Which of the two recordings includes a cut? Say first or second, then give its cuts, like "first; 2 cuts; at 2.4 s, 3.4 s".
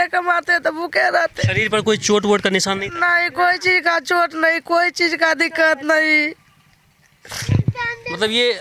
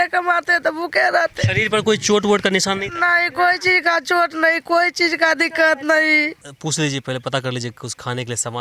second; 1 cut; at 6.5 s